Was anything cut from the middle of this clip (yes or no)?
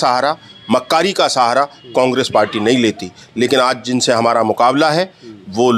no